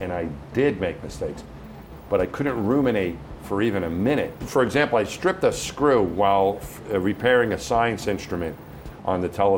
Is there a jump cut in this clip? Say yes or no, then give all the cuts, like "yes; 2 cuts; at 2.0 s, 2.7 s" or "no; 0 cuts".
yes; 1 cut; at 4.4 s